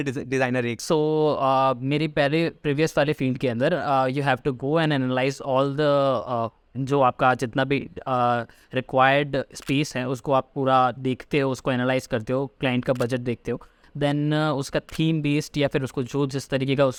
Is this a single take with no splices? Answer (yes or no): yes